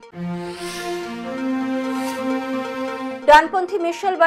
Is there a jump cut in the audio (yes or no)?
no